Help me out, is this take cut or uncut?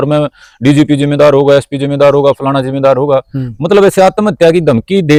uncut